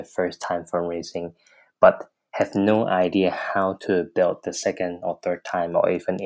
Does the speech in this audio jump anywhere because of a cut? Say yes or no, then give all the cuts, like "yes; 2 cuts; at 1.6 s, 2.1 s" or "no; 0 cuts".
no; 0 cuts